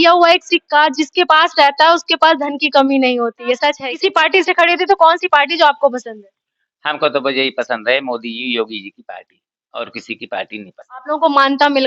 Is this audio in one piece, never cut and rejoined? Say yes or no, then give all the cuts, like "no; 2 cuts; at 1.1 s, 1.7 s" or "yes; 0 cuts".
no; 1 cut; at 3.9 s